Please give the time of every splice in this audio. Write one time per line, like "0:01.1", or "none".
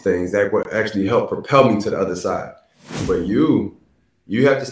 0:03.0